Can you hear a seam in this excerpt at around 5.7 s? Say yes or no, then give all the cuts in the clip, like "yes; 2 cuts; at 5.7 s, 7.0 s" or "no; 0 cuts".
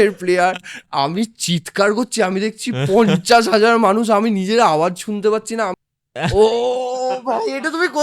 yes; 1 cut; at 5.7 s